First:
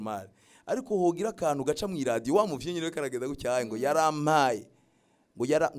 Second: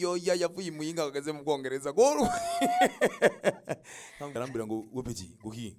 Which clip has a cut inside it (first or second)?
second